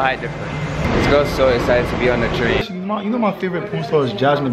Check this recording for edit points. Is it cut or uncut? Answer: cut